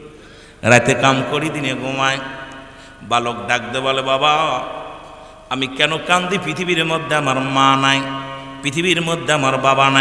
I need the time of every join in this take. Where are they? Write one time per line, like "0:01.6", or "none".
none